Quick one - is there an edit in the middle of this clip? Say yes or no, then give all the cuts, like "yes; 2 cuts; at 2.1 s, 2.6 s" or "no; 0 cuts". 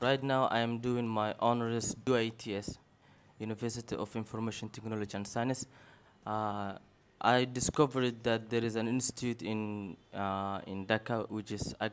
yes; 1 cut; at 2.0 s